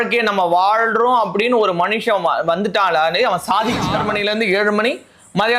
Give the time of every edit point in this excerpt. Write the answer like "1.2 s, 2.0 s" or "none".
4.0 s